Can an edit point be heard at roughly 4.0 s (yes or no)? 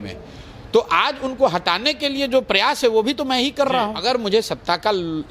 yes